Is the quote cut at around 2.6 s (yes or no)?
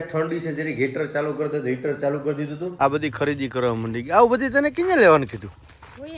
yes